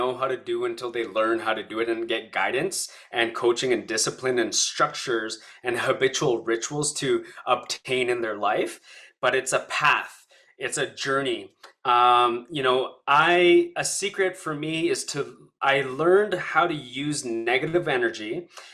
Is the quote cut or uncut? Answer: uncut